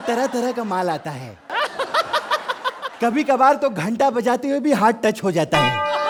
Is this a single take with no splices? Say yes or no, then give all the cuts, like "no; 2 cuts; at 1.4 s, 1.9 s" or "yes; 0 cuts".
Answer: yes; 0 cuts